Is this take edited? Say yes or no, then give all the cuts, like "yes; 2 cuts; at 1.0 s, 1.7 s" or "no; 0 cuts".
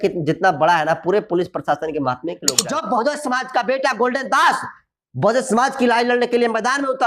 yes; 1 cut; at 2.6 s